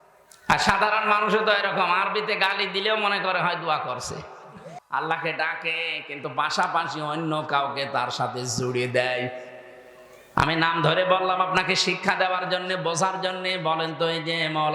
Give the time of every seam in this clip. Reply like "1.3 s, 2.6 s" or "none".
4.7 s